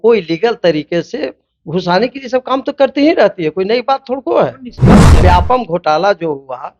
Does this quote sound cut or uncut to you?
cut